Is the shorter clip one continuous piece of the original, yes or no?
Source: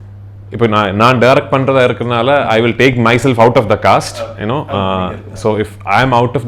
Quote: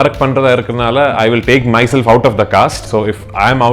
no